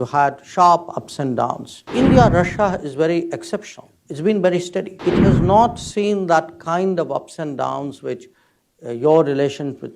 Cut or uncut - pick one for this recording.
cut